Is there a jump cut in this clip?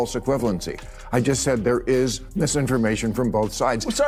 no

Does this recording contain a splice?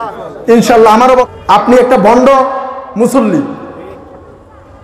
yes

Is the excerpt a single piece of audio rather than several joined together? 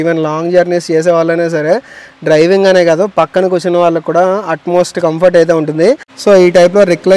no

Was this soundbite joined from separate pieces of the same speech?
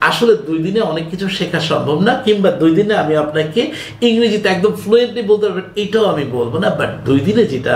no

